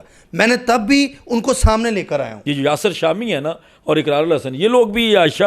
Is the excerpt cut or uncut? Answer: cut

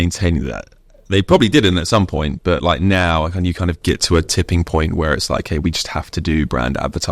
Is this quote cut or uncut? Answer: uncut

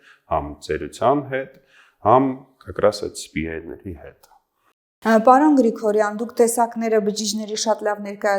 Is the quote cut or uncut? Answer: uncut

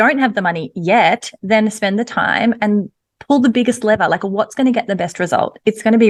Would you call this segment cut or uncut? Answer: uncut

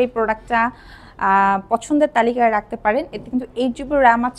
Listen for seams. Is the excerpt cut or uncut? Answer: uncut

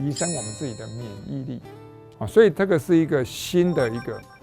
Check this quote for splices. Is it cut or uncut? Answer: cut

